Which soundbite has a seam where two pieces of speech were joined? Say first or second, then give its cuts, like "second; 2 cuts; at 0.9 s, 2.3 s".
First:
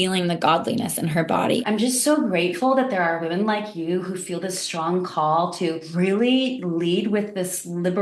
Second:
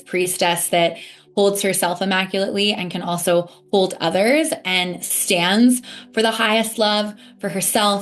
first; 2 cuts; at 1.6 s, 5.9 s